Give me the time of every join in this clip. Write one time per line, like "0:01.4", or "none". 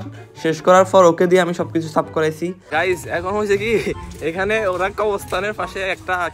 0:02.6